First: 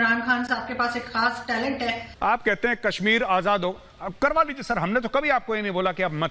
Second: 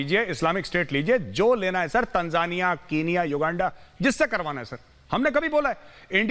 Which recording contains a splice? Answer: first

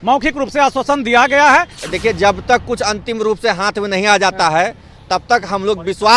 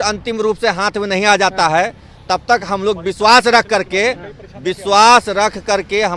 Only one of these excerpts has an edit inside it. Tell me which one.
first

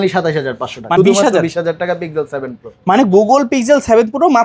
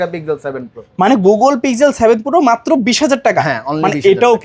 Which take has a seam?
first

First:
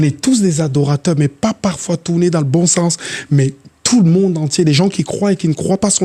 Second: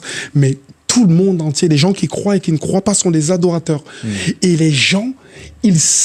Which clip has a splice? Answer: second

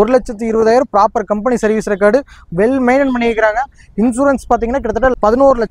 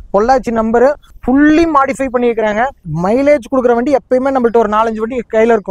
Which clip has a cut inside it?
second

